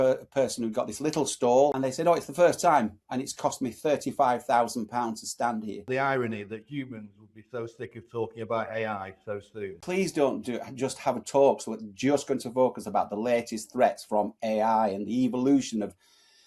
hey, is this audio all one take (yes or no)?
no